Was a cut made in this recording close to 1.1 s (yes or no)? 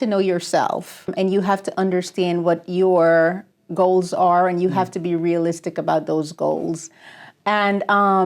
yes